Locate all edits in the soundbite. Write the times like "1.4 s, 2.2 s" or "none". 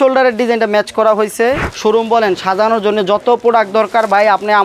1.7 s